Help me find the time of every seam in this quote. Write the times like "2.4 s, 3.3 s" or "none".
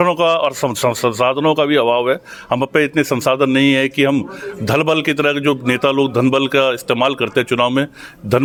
none